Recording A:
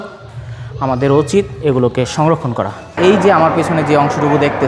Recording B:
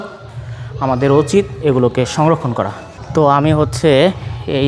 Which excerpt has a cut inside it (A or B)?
A